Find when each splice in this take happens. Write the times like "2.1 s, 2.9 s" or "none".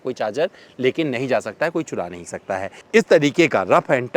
2.8 s